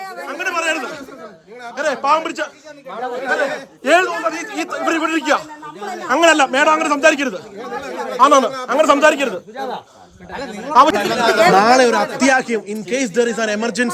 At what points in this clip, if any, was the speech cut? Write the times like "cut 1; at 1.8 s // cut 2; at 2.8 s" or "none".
cut 1; at 10.9 s